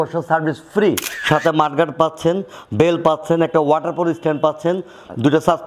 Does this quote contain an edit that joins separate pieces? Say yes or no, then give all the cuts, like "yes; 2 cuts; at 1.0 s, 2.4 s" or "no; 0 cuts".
yes; 1 cut; at 1.1 s